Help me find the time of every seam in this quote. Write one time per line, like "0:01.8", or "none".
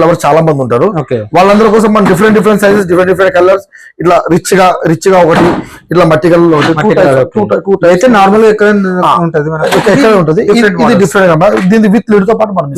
none